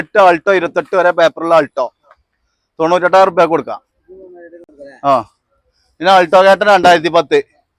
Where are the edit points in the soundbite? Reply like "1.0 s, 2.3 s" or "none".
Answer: none

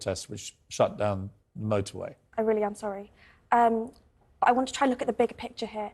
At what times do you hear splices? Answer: 2.2 s

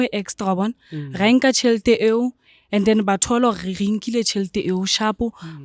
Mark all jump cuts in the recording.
none

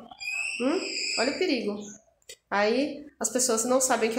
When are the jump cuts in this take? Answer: none

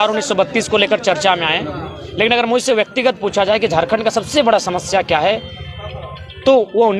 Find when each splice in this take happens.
none

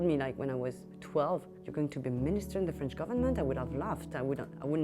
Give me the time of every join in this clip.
0.9 s, 1.6 s

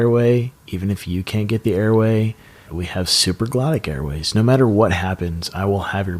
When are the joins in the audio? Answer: 2.8 s

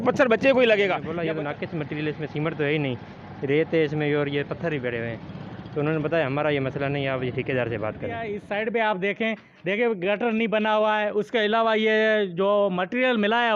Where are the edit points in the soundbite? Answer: 1.1 s, 8.3 s

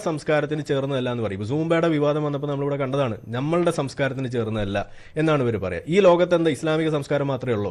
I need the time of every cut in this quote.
none

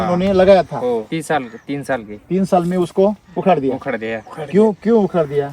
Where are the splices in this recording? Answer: 1.1 s

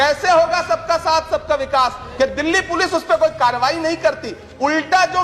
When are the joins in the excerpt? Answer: 2.0 s

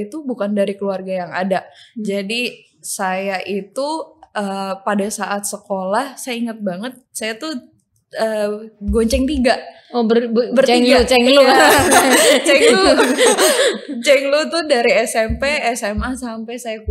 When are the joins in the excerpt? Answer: none

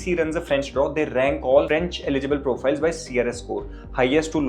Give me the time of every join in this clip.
none

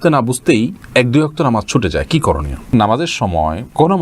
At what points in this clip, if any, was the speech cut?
2.7 s

